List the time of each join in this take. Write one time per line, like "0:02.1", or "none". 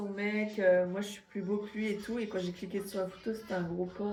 none